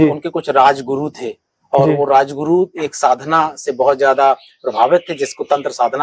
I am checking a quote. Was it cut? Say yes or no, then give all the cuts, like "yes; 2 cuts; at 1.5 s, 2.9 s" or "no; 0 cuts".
no; 0 cuts